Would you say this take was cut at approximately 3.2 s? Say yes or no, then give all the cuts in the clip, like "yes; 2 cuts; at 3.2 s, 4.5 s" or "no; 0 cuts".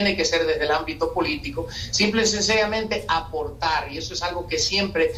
no; 0 cuts